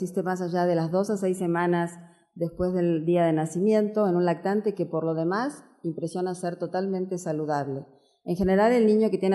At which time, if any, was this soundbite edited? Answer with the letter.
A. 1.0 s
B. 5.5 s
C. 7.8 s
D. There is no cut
C